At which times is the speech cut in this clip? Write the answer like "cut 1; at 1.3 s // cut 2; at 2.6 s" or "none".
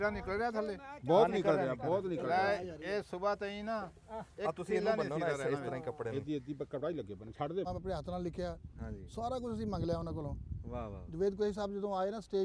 cut 1; at 7.7 s